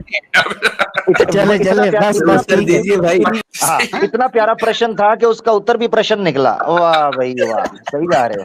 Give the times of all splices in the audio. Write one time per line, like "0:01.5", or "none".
0:03.4